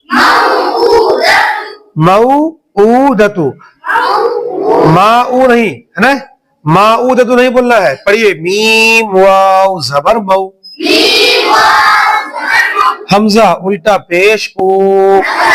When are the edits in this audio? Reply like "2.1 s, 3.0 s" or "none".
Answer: none